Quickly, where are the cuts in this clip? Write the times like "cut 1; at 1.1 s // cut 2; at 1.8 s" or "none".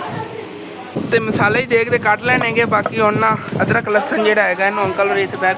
cut 1; at 0.9 s